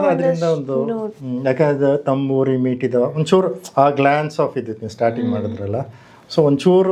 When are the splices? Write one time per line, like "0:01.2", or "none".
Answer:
none